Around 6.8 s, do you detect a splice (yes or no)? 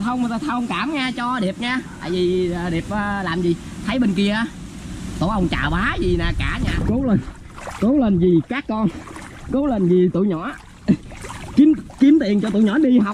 yes